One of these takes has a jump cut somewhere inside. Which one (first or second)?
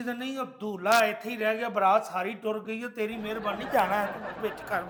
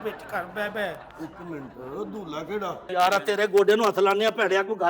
second